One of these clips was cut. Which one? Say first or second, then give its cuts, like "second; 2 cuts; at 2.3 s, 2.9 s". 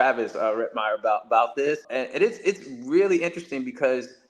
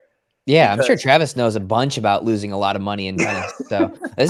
first; 1 cut; at 1.8 s